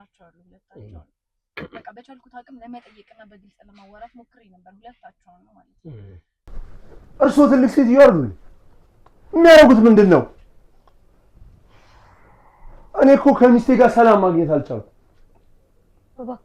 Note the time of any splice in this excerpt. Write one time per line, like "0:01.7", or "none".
0:06.5